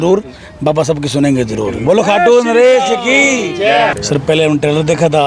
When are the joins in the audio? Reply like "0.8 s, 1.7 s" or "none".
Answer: 4.0 s